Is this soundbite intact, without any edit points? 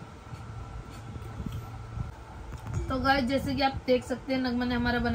no; 1 cut; at 2.1 s

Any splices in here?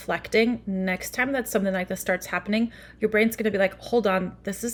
no; 0 cuts

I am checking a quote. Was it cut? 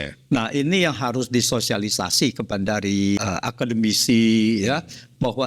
yes; 1 cut; at 3.2 s

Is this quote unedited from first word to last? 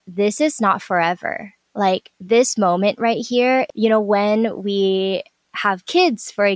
no; 1 cut; at 3.7 s

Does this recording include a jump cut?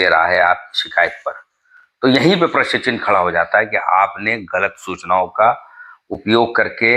no; 0 cuts

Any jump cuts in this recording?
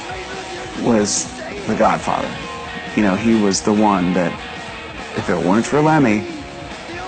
no; 0 cuts

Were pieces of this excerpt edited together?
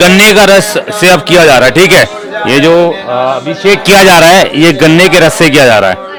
no; 0 cuts

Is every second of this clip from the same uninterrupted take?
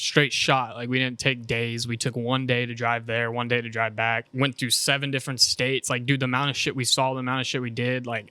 no; 1 cut; at 4.3 s

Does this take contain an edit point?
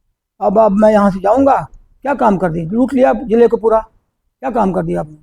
no; 0 cuts

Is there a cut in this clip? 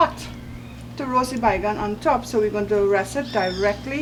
no; 0 cuts

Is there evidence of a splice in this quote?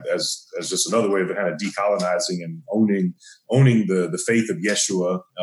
no; 0 cuts

